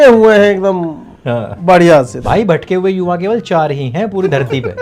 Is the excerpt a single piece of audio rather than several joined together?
no; 1 cut; at 2.2 s

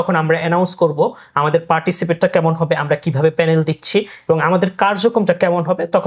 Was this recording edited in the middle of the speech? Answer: no; 0 cuts

